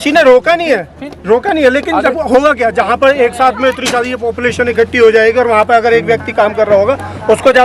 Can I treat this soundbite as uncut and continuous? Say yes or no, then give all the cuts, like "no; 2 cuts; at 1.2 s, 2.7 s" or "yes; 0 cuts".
yes; 0 cuts